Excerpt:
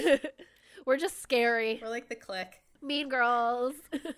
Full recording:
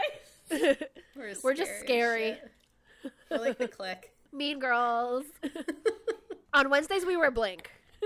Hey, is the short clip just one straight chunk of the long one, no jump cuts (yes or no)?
no